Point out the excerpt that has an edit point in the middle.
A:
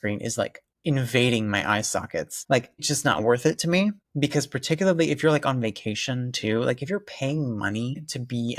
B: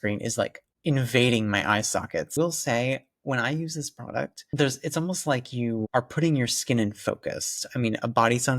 B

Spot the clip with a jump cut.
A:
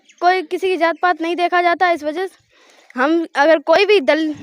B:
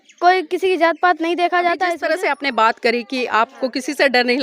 B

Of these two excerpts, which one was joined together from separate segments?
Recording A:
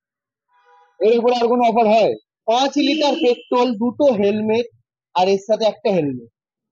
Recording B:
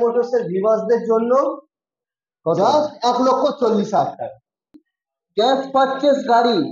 B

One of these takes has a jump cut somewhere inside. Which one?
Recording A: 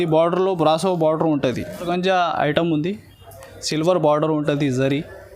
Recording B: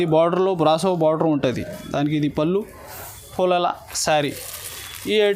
A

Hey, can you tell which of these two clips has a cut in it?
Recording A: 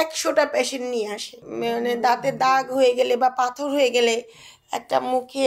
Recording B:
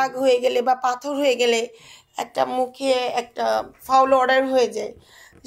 A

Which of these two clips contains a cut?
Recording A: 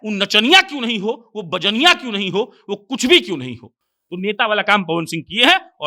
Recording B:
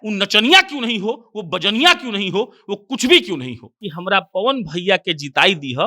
B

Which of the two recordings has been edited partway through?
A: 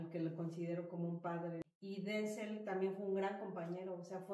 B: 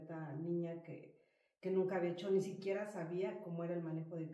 A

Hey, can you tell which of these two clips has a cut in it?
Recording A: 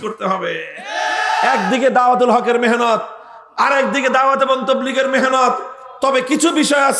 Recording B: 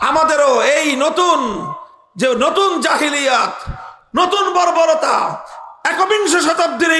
A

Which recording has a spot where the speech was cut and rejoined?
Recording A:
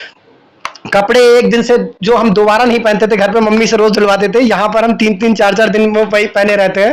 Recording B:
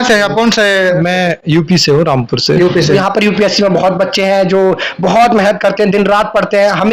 B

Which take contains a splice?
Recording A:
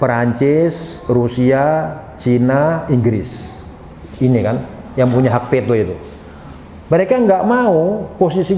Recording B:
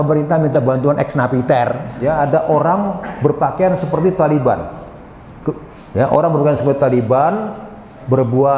B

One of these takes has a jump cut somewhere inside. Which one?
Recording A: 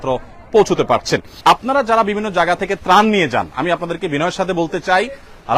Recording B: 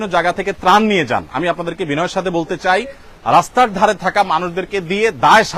A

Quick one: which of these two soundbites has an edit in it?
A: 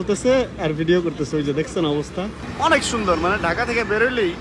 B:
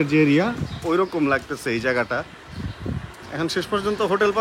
A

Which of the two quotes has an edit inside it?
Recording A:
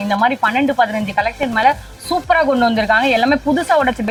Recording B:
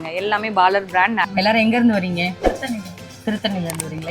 B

